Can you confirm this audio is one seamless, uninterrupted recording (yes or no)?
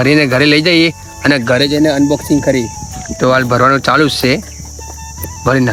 yes